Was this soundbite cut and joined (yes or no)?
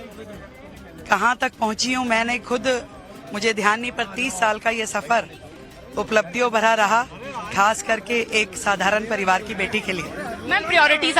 no